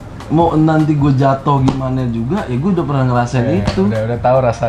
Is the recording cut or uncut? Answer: uncut